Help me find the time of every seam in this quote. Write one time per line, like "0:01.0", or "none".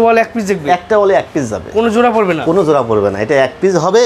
none